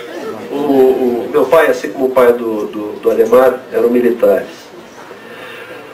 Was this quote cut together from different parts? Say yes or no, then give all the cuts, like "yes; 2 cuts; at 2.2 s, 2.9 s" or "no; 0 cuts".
no; 0 cuts